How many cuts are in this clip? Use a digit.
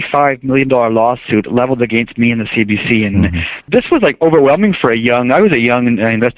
1